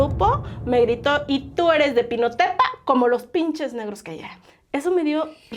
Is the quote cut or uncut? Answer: uncut